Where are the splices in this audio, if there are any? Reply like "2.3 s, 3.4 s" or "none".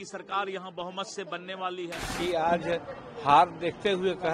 2.0 s